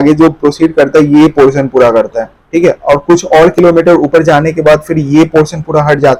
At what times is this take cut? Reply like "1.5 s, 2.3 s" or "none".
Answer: none